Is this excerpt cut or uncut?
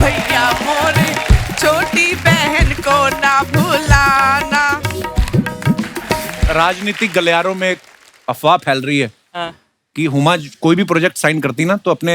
cut